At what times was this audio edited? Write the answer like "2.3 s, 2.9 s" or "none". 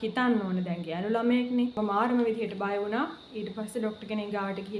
1.8 s